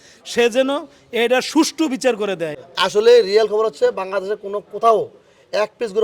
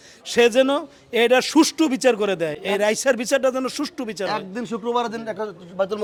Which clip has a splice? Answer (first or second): first